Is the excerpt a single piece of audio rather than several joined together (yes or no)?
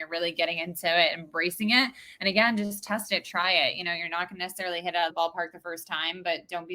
no